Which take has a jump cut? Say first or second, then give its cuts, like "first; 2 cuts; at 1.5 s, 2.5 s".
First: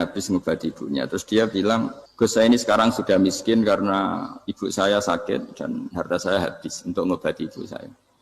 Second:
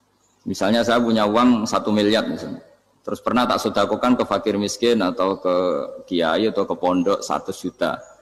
first; 1 cut; at 2.0 s